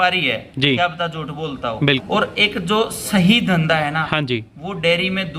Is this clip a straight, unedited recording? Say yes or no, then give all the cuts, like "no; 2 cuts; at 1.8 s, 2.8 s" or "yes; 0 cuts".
no; 1 cut; at 2.0 s